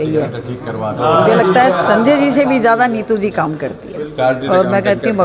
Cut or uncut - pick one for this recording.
uncut